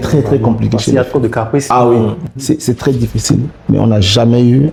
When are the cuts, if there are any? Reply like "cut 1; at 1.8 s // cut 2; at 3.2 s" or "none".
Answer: none